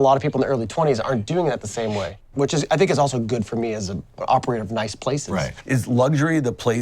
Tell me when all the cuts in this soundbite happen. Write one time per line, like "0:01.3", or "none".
0:02.2
0:04.2
0:05.6